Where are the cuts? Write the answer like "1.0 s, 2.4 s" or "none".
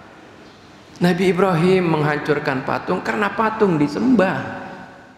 none